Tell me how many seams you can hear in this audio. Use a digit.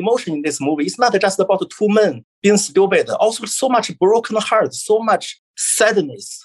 1